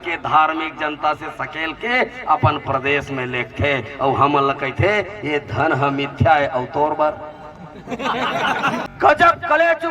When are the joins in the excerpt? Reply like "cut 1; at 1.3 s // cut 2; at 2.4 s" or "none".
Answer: cut 1; at 8.9 s